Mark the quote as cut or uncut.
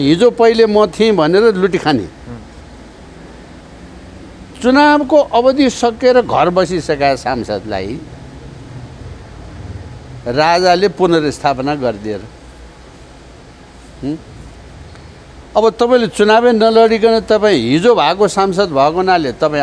uncut